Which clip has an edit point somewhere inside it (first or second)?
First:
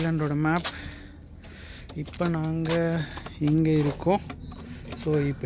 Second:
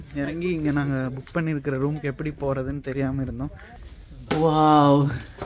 second